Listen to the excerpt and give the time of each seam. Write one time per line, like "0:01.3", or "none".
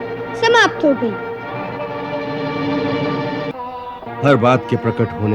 0:03.5